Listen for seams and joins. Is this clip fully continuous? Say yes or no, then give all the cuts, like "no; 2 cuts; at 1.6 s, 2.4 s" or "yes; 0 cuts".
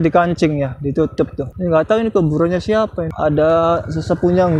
no; 2 cuts; at 1.4 s, 3.1 s